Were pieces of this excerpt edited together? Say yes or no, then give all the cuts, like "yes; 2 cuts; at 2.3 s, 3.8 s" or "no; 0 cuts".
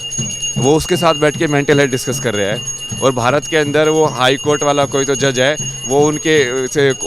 no; 0 cuts